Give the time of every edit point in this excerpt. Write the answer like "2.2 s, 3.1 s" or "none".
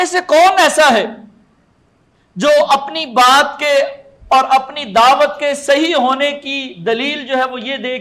none